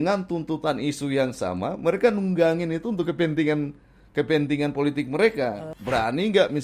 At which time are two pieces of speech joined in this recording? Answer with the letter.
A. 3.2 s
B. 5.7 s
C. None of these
B